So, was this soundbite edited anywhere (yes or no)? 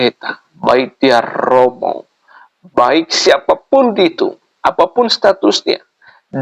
no